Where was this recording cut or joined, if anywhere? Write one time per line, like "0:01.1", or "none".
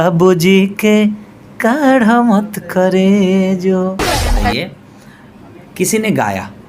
0:04.3

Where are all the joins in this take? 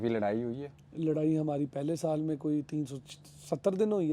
none

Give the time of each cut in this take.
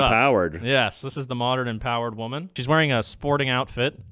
none

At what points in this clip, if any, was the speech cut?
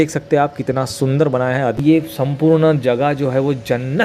0:01.8

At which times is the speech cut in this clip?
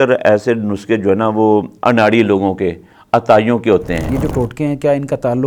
0:04.1

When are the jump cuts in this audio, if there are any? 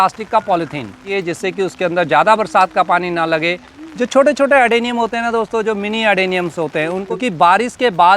0:01.1
0:03.7
0:07.0

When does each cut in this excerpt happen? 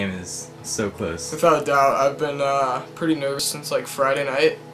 0:03.5

